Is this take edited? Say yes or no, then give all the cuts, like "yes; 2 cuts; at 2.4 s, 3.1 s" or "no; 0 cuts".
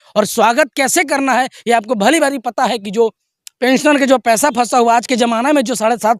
no; 0 cuts